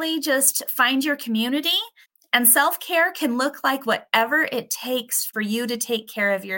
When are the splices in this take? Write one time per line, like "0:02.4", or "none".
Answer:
0:05.3